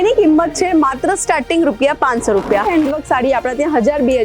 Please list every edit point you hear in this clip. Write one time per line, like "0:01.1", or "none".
0:02.7